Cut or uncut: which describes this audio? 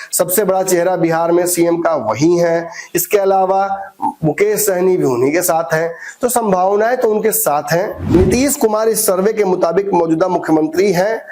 cut